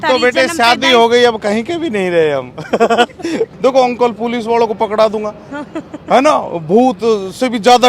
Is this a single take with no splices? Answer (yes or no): no